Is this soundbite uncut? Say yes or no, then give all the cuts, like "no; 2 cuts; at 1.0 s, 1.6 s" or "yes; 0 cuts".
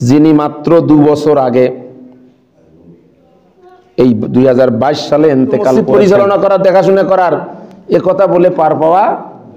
no; 1 cut; at 5.8 s